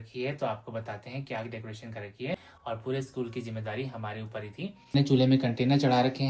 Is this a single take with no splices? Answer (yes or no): no